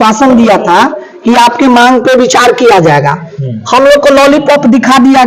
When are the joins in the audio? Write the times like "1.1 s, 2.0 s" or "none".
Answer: none